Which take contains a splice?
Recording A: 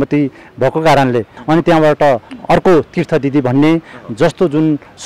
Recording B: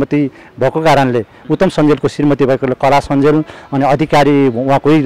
A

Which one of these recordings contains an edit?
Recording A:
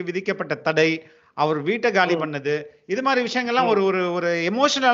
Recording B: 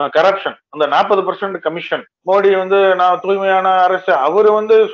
B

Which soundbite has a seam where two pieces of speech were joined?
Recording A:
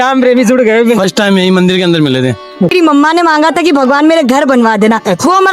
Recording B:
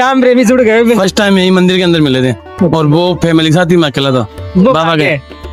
A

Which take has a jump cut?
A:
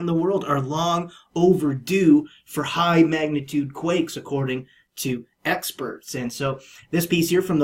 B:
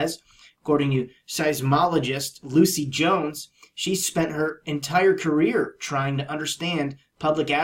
A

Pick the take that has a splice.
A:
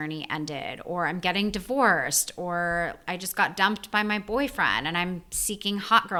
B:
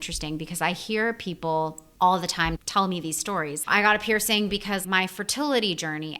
B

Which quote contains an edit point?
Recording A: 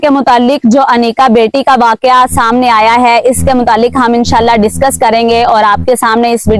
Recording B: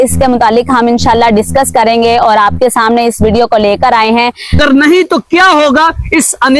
B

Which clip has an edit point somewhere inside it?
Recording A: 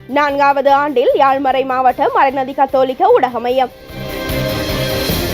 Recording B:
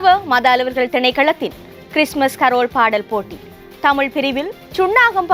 A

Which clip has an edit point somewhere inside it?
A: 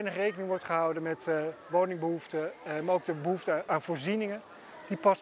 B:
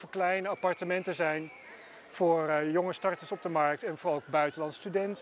A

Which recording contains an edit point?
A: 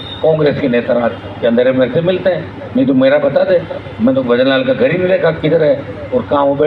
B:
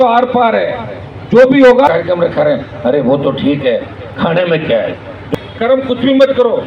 B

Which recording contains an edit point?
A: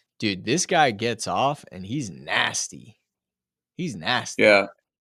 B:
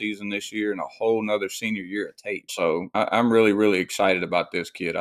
B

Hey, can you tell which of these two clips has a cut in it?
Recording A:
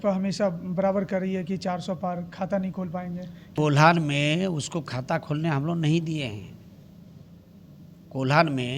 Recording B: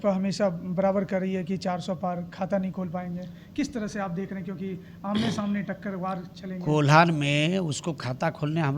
A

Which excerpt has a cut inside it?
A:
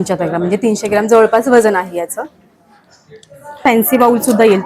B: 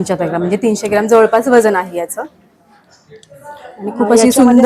A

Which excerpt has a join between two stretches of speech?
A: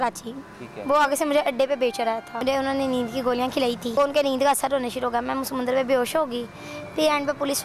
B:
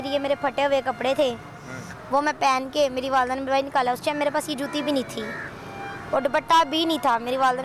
A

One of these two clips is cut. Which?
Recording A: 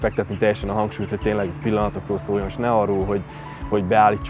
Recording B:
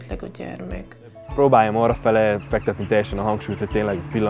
B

